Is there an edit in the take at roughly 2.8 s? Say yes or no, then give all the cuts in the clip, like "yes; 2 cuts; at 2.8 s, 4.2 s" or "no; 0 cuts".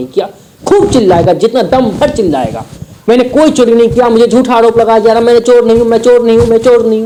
no; 0 cuts